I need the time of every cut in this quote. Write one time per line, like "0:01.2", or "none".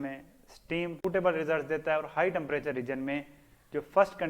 0:00.9